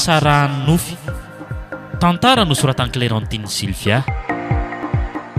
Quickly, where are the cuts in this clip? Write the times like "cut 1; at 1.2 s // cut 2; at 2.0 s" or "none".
cut 1; at 4.0 s